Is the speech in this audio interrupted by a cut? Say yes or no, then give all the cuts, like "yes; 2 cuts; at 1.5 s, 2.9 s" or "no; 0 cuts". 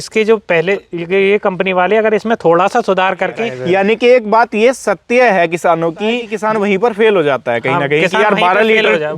yes; 3 cuts; at 1.1 s, 3.5 s, 6.3 s